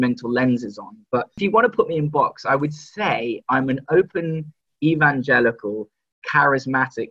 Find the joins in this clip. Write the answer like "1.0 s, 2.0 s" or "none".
1.4 s